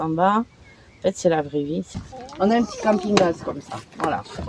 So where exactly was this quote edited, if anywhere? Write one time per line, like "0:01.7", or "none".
0:01.9